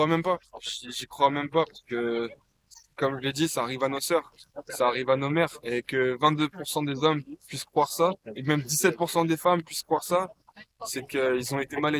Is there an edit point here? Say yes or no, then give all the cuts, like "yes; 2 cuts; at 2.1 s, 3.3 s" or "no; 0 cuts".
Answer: no; 0 cuts